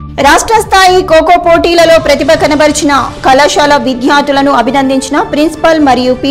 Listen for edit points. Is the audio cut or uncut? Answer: uncut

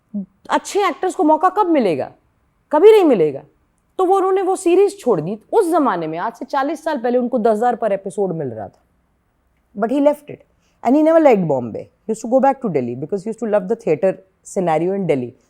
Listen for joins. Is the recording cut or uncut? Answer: uncut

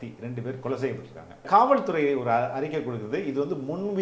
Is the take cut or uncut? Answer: cut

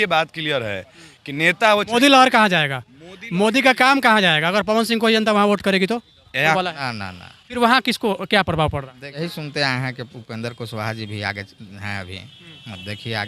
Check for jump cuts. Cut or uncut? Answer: cut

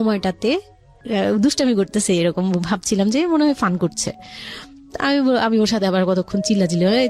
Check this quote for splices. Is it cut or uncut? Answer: cut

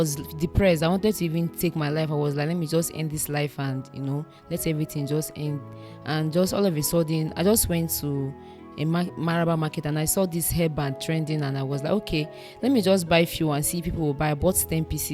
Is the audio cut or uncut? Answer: uncut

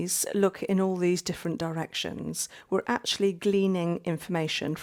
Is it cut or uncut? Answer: uncut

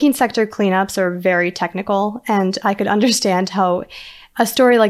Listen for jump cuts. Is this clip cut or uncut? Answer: uncut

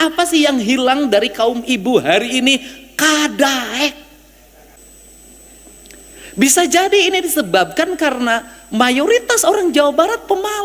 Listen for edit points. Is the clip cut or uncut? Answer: cut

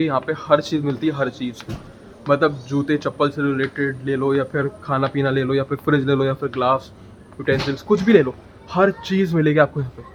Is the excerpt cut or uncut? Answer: uncut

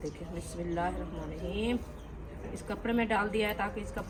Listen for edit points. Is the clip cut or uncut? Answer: uncut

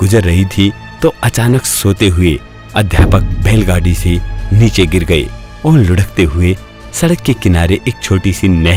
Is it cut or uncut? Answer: uncut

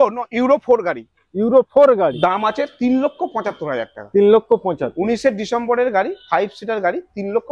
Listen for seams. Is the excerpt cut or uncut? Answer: cut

